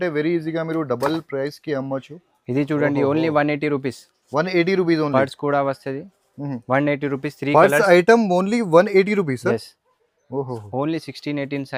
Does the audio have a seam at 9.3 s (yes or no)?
no